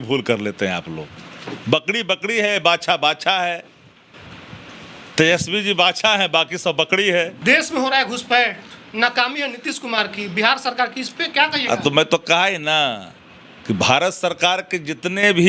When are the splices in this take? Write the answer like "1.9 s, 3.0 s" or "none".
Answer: 7.3 s